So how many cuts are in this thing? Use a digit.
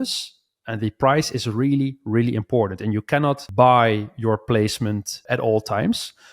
2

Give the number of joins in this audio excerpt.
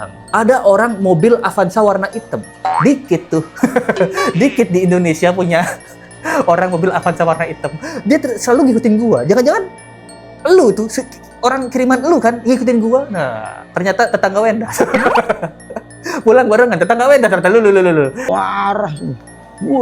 1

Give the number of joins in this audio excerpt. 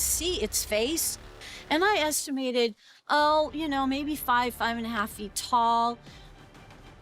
1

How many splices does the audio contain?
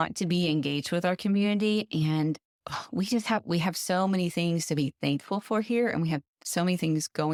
0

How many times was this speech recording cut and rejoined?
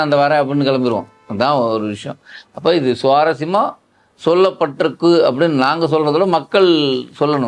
0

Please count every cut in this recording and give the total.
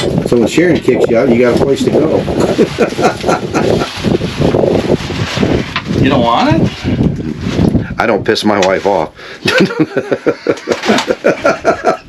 0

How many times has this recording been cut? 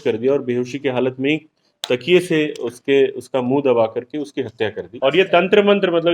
1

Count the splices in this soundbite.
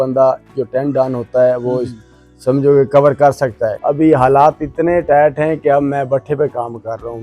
1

